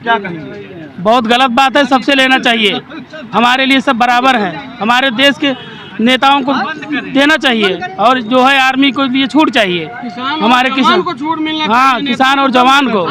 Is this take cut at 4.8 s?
no; 0 cuts

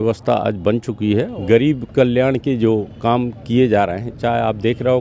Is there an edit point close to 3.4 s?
no; 1 cut; at 1.3 s

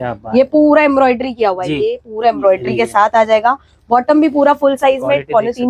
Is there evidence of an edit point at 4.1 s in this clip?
no; 0 cuts

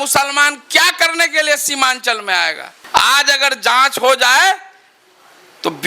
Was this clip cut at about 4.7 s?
no; 1 cut; at 2.7 s

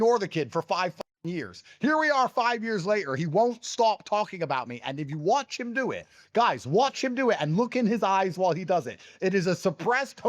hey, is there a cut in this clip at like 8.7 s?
no; 0 cuts

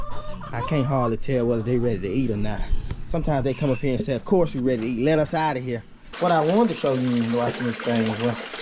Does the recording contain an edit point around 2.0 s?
no; 1 cut; at 6.0 s

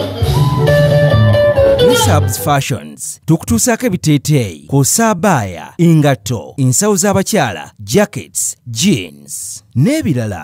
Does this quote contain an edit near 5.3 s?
no; 1 cut; at 2.4 s

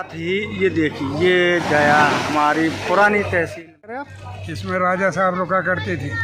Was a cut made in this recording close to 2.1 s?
no; 1 cut; at 3.9 s

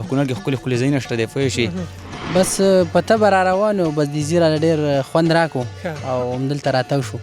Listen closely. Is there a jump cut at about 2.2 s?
yes; 1 cut; at 2.2 s

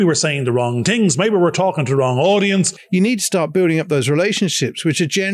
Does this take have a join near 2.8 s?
yes; 1 cut; at 2.8 s

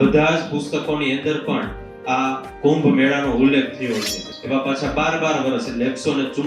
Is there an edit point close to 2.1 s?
no; 1 cut; at 4.2 s

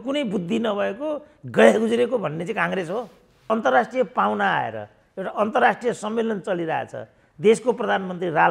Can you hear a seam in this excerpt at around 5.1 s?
no; 1 cut; at 3.5 s

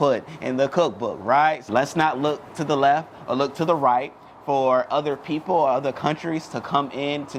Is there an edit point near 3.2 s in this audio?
no; 1 cut; at 1.6 s

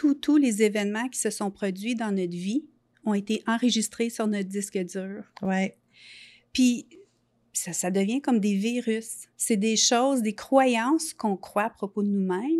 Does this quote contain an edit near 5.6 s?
no; 0 cuts

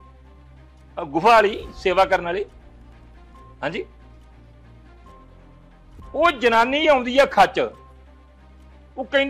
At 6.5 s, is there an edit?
no; 1 cut; at 0.9 s

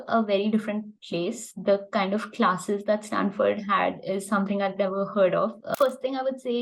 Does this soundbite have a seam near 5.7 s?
yes; 1 cut; at 5.7 s

